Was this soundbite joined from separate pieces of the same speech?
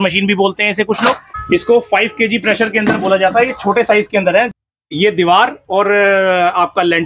yes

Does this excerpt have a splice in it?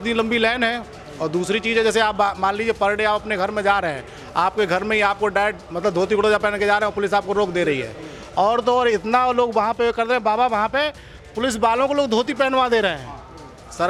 no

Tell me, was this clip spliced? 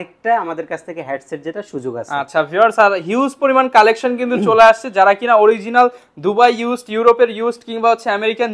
no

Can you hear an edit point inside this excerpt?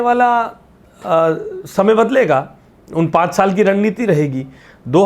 no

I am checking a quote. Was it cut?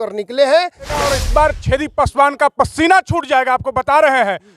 yes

